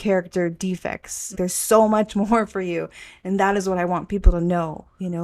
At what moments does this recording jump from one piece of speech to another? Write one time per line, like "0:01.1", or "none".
0:01.3